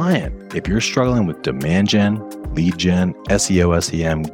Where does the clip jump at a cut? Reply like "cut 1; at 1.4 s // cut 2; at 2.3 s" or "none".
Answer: none